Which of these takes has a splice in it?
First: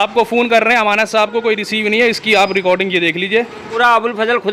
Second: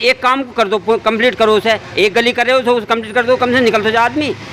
first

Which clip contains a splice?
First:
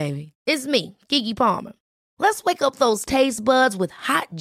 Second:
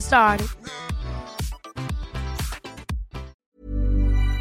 second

